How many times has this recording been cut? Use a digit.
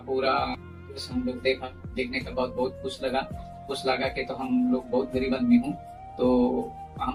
0